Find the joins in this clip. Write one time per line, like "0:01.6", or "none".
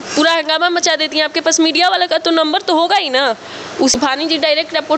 0:03.9